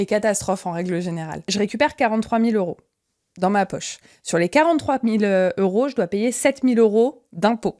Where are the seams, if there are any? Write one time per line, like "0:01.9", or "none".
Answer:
0:01.5